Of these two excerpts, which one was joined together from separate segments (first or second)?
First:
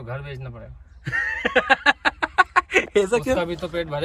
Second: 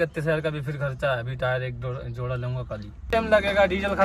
second